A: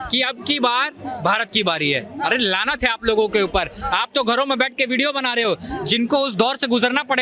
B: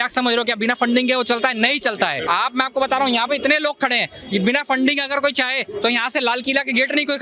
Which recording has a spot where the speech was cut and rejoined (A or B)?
B